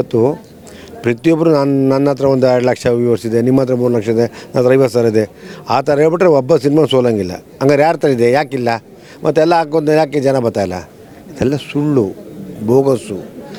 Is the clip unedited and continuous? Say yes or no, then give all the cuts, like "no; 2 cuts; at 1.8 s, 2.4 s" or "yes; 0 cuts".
yes; 0 cuts